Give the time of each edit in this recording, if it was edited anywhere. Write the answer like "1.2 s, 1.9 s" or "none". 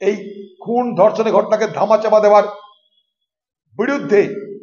none